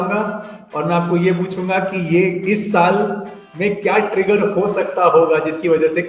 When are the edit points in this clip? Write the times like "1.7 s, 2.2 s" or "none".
none